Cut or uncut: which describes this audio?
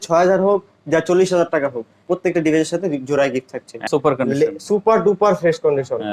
cut